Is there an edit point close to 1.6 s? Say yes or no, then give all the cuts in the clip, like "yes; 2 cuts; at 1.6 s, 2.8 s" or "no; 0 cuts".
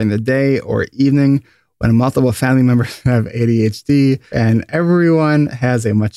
no; 1 cut; at 4.3 s